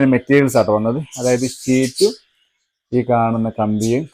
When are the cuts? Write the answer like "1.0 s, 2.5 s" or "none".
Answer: none